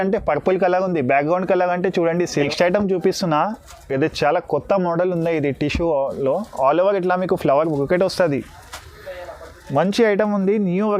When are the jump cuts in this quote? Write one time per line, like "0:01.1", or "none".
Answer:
0:02.3